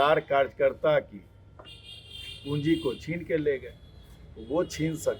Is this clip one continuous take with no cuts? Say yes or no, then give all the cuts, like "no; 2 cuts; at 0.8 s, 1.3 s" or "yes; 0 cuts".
yes; 0 cuts